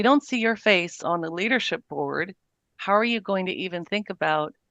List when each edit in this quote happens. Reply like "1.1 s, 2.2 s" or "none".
1.0 s